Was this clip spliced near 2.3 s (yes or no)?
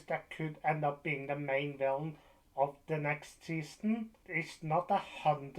no